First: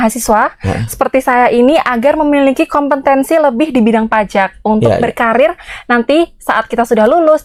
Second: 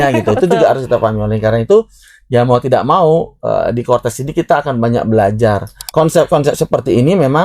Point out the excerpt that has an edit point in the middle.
second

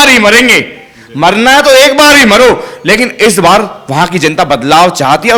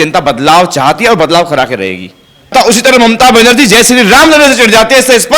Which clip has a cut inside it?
second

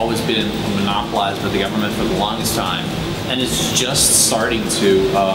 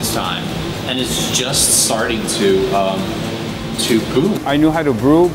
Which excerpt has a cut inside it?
second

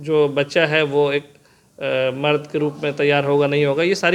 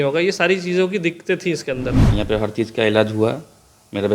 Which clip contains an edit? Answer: second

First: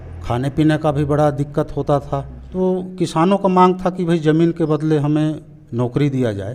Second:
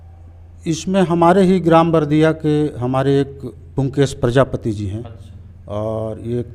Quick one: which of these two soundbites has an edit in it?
first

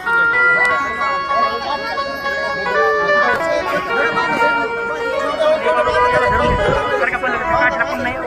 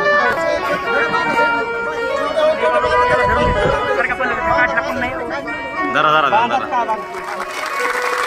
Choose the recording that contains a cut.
second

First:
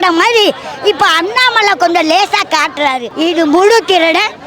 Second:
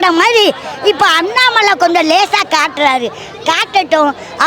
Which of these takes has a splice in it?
first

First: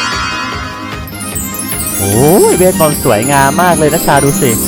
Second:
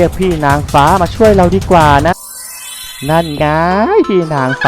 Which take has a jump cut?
second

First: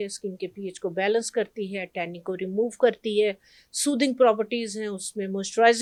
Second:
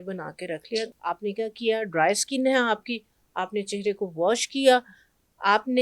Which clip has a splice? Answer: second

